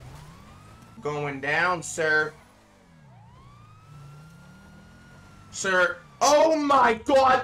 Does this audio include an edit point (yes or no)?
yes